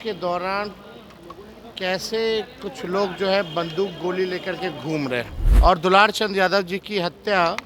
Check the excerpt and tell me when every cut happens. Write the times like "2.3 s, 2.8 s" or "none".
5.4 s